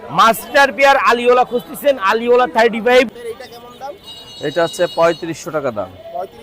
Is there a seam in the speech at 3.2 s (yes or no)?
yes